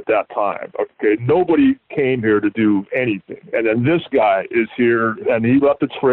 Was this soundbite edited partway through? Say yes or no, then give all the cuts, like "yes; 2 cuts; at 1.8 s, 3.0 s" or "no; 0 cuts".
yes; 2 cuts; at 3.3 s, 5.2 s